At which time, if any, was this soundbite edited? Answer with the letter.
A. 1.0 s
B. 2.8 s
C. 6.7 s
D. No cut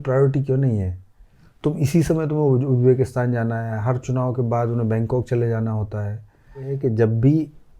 C